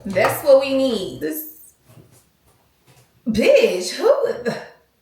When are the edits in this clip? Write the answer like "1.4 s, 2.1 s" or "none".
1.2 s